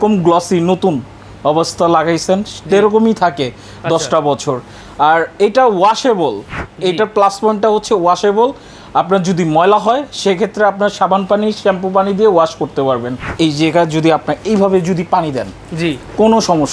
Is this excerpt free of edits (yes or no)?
no